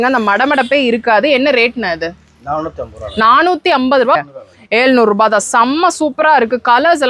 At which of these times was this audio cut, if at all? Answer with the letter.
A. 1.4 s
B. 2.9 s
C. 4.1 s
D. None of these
C